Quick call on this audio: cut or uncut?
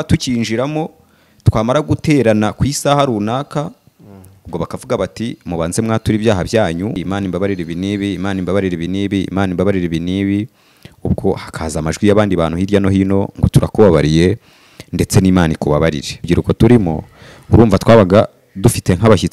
cut